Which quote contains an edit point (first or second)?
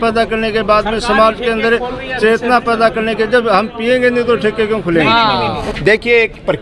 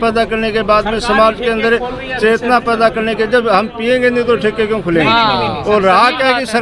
first